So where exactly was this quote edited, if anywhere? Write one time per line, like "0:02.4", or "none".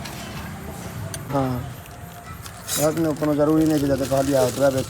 0:01.2